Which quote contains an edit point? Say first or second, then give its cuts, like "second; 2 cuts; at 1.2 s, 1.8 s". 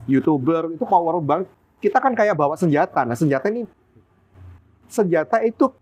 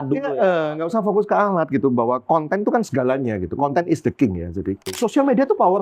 second; 1 cut; at 4.8 s